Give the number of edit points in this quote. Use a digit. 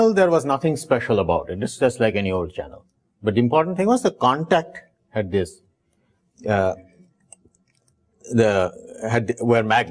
1